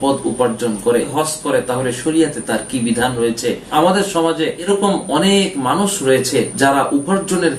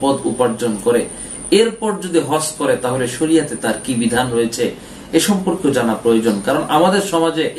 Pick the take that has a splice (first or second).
first